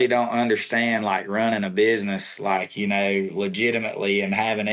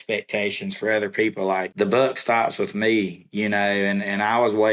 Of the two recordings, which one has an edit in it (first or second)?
second